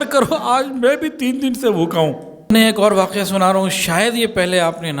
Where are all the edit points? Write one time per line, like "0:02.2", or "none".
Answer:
0:02.5